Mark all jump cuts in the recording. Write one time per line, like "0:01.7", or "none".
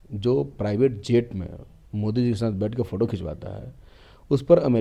none